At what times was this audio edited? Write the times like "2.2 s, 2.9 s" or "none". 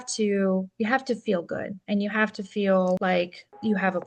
3.0 s